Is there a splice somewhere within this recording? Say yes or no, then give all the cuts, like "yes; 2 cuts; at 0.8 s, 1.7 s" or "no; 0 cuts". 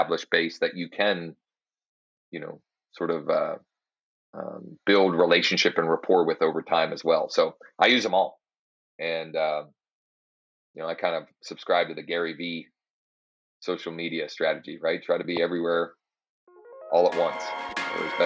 no; 0 cuts